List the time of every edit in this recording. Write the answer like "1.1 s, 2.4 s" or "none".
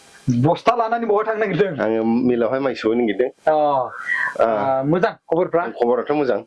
none